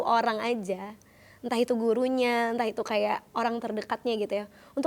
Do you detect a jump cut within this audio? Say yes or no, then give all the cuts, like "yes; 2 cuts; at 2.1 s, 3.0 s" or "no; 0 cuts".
no; 0 cuts